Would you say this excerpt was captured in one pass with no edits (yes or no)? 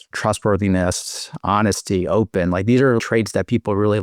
no